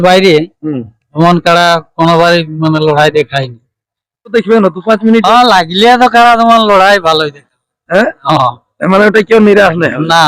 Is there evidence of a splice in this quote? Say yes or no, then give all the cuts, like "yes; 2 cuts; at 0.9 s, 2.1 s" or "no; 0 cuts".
yes; 1 cut; at 4.3 s